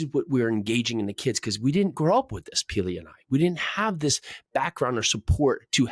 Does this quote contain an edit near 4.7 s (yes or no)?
no